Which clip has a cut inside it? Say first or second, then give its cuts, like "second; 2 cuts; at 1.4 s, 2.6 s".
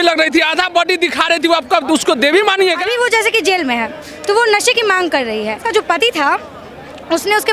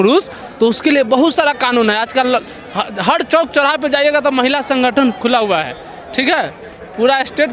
first; 2 cuts; at 2.9 s, 5.6 s